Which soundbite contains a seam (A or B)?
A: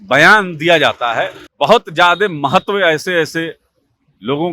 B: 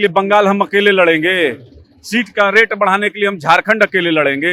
A